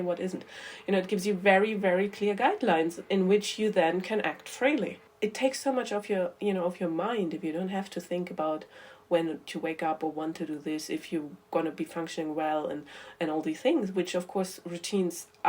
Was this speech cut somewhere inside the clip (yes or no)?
yes